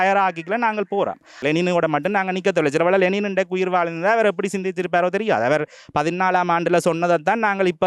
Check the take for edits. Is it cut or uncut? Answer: cut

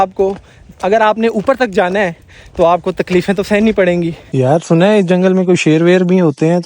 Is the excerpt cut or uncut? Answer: cut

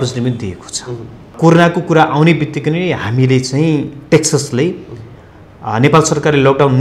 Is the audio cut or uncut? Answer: cut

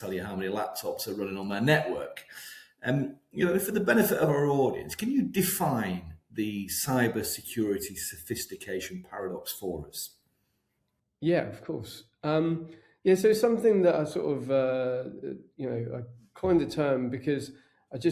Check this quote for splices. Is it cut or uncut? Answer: uncut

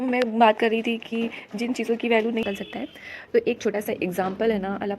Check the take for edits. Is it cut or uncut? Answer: cut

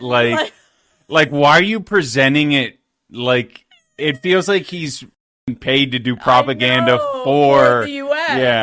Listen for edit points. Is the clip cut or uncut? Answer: uncut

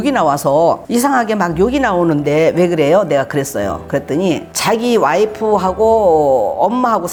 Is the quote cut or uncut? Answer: uncut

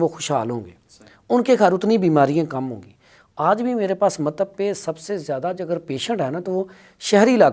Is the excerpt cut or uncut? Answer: uncut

